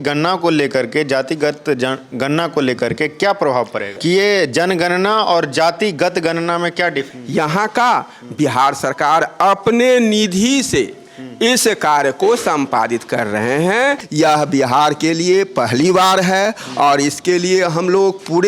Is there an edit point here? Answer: yes; 3 cuts; at 3.9 s, 7.2 s, 14.0 s

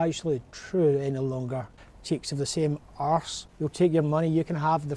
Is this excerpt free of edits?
no; 2 cuts; at 1.7 s, 3.4 s

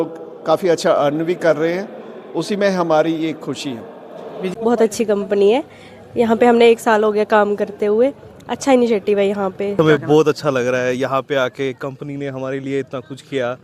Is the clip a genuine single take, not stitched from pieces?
no; 2 cuts; at 4.5 s, 9.9 s

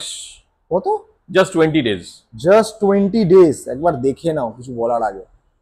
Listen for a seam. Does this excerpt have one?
no; 0 cuts

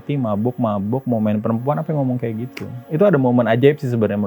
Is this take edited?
no; 0 cuts

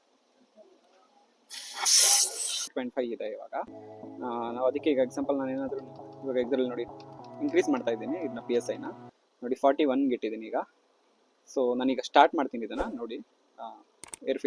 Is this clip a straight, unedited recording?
no; 1 cut; at 2.7 s

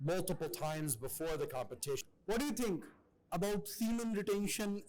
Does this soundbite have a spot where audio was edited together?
yes; 1 cut; at 2.1 s

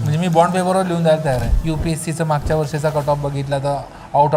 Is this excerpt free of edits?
no; 1 cut; at 1.5 s

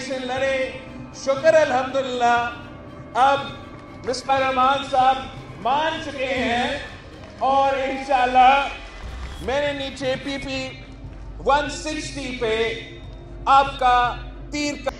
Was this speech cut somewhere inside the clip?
no; 0 cuts

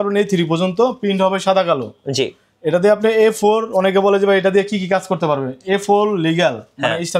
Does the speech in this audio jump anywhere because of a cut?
no; 0 cuts

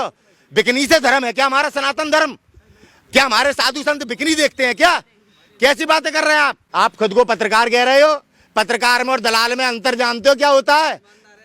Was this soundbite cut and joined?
yes; 1 cut; at 6.6 s

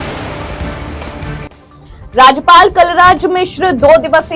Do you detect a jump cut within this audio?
yes; 1 cut; at 1.7 s

